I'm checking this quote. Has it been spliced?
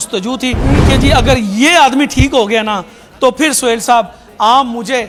no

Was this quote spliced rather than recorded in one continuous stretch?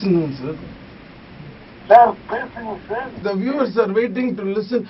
yes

